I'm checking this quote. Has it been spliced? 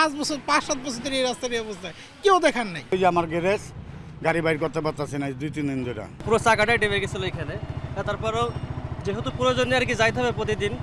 no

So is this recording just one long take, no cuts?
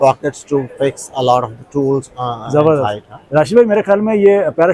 yes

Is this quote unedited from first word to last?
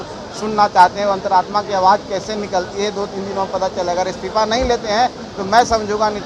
yes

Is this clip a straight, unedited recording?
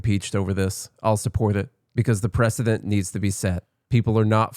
no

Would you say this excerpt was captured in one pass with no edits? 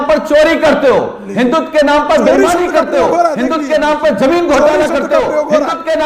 yes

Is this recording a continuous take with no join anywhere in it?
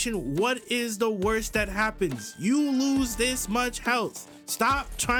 yes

